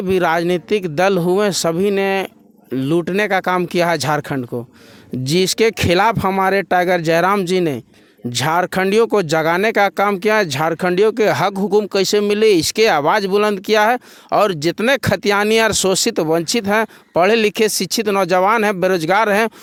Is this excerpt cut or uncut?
uncut